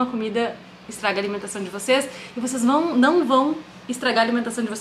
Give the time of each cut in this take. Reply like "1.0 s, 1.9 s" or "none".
none